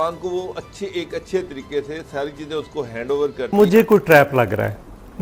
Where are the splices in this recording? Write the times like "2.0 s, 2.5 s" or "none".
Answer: 3.5 s